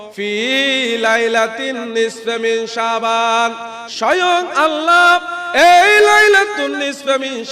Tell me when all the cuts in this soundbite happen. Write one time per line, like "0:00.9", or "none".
0:06.5